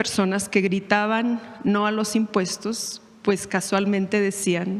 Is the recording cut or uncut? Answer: uncut